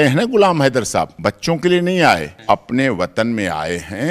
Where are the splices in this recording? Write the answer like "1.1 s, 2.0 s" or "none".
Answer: 1.1 s, 2.3 s